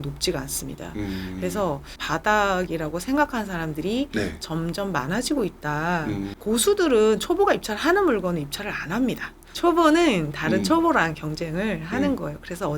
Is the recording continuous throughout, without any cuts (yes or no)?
no